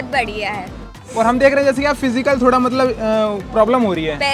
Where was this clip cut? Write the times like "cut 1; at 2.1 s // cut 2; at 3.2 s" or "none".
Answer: cut 1; at 1.0 s